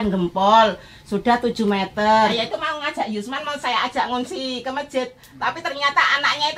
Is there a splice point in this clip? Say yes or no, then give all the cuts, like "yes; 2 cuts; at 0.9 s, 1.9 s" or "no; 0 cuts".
yes; 1 cut; at 2.3 s